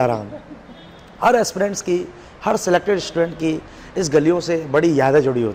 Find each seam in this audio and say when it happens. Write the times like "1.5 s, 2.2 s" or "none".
none